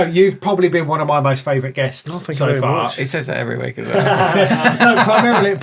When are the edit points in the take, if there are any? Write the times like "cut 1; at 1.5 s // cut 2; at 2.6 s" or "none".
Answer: none